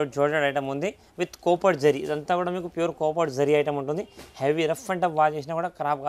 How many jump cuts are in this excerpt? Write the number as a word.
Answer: zero